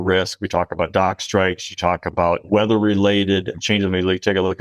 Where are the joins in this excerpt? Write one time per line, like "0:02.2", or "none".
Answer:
0:02.4